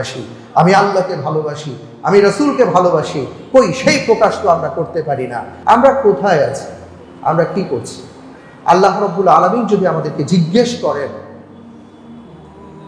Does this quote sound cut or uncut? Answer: cut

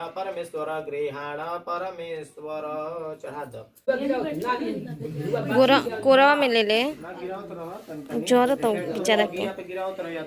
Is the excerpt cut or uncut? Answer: cut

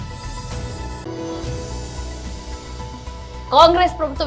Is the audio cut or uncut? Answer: cut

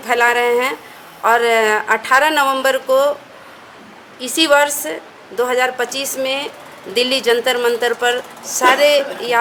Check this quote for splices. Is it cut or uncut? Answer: uncut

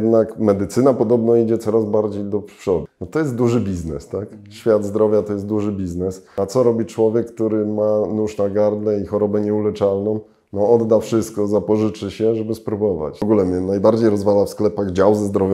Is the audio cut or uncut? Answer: cut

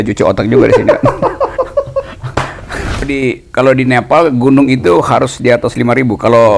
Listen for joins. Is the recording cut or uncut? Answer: cut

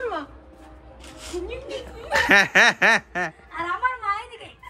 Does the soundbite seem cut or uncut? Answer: uncut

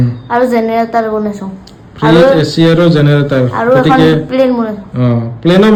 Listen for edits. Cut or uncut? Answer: uncut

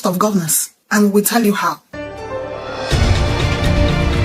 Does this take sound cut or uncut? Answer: cut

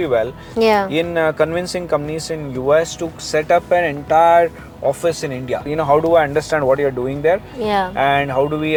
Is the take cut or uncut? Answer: uncut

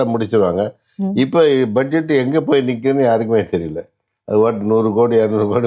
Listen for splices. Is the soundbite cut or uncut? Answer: uncut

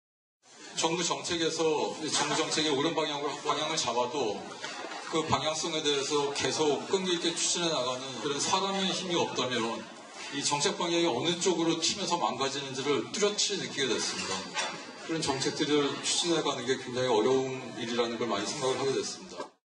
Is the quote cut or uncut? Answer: cut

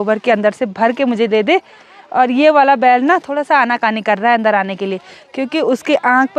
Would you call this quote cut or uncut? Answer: uncut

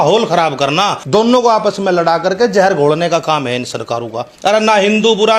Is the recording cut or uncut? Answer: cut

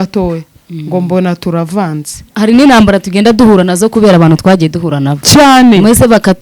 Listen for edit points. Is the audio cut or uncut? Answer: cut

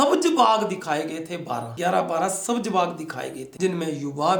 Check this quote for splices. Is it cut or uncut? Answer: uncut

